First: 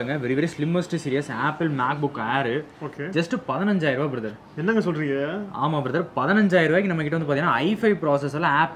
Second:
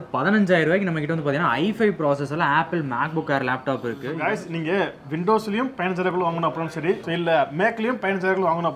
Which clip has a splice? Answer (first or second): second